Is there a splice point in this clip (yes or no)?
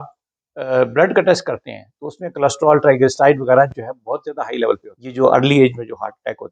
yes